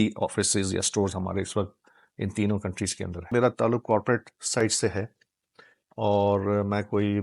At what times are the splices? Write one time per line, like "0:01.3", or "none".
0:03.3